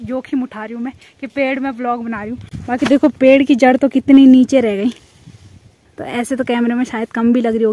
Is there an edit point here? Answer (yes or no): no